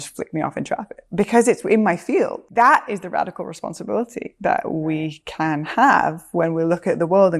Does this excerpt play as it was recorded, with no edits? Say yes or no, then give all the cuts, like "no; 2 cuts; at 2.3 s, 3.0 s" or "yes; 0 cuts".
no; 2 cuts; at 1.0 s, 2.4 s